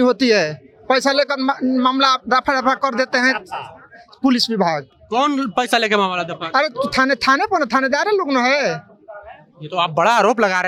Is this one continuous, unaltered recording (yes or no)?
yes